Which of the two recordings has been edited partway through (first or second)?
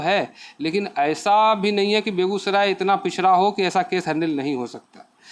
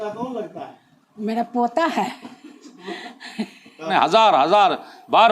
second